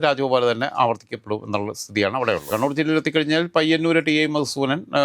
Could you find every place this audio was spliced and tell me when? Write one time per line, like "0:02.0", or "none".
0:02.5

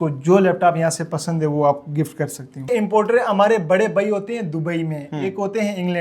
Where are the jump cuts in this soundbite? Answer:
0:02.7

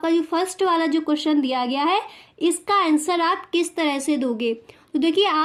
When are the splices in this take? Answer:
none

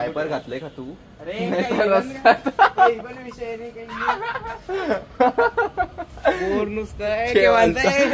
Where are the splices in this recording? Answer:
none

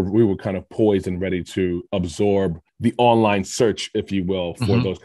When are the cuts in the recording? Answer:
0:02.6

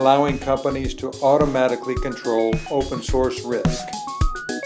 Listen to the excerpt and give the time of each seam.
0:03.6

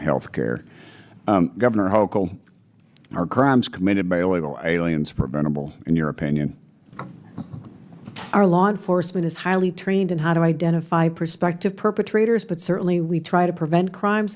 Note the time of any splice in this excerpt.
0:06.8

